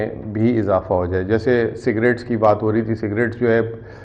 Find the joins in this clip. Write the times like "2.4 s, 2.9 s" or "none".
none